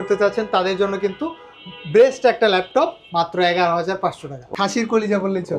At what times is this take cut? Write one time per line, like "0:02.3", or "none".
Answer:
0:04.4